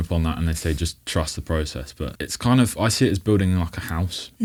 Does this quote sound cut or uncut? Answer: uncut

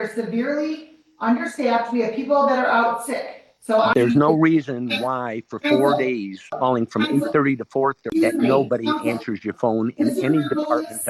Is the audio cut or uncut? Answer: cut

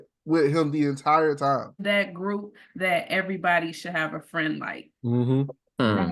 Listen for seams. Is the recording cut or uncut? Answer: cut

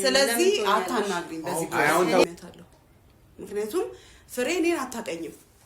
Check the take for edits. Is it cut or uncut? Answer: cut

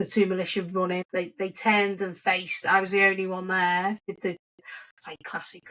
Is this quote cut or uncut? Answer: cut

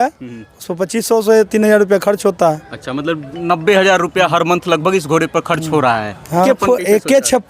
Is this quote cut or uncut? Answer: cut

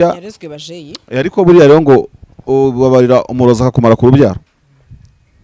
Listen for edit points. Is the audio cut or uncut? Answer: uncut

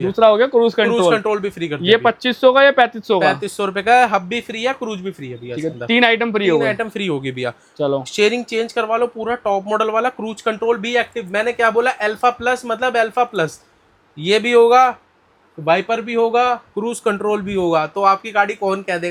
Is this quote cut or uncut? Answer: uncut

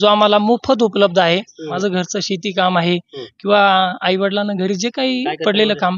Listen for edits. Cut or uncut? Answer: uncut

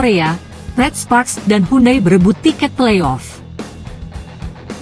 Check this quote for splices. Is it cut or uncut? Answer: cut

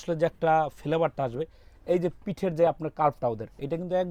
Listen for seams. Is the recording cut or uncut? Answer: uncut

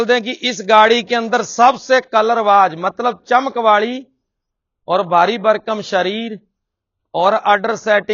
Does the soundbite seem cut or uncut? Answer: uncut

